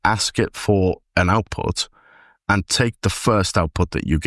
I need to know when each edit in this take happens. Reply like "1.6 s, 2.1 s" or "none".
none